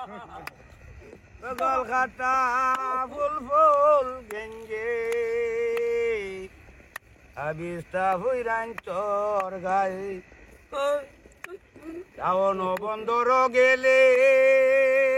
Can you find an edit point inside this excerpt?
no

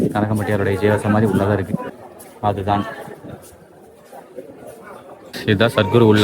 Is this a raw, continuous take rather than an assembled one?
no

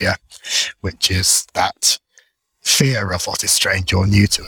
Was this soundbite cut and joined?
no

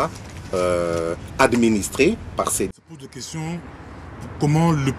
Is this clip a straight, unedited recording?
no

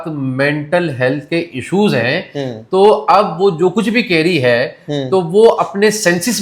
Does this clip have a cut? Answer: no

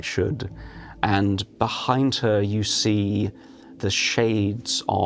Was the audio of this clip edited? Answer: yes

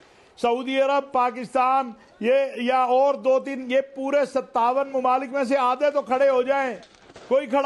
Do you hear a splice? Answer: no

